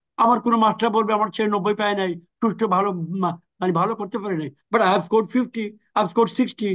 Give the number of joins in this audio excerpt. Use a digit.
0